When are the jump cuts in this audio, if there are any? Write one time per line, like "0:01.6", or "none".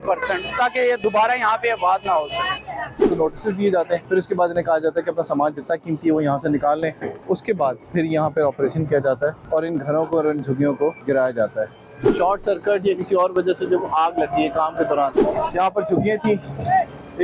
0:03.1
0:04.0
0:07.5
0:09.4
0:11.0
0:12.2
0:15.2